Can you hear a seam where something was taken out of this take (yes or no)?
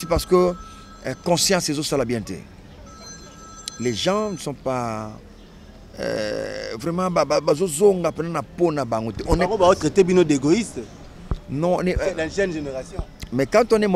no